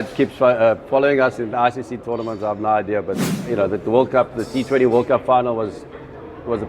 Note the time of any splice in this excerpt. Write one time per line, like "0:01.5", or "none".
0:03.3